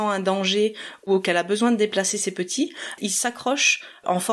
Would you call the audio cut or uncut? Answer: cut